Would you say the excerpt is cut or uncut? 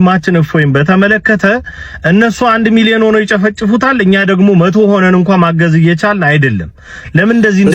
uncut